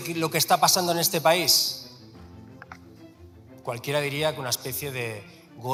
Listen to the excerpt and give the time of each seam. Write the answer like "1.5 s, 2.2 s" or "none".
none